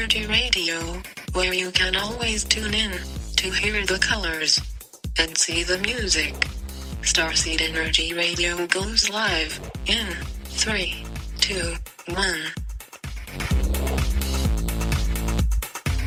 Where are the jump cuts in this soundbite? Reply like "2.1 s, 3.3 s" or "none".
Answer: none